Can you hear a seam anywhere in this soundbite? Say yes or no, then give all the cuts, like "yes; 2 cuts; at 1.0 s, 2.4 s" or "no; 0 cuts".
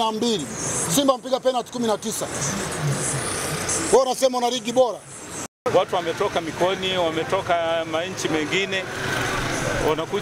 yes; 1 cut; at 5.6 s